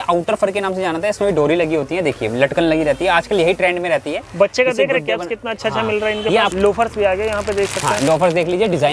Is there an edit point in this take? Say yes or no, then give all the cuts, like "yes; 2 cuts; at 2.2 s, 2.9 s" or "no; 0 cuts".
yes; 1 cut; at 6.5 s